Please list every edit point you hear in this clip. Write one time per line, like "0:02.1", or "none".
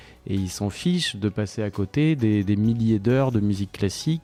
none